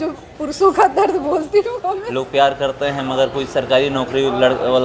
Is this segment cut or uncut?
cut